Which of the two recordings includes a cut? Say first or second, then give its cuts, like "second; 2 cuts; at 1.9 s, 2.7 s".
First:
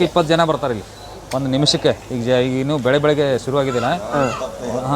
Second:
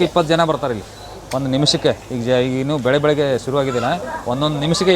second; 1 cut; at 4.0 s